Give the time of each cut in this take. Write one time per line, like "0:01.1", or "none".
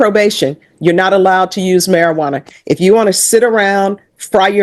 none